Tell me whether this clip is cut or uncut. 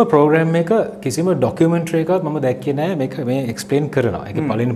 uncut